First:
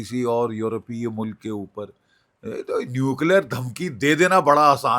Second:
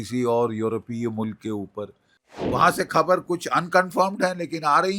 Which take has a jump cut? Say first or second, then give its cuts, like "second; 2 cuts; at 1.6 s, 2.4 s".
second; 1 cut; at 2.5 s